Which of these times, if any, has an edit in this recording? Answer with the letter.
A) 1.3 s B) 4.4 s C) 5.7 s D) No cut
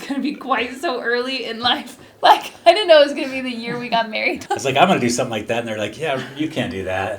B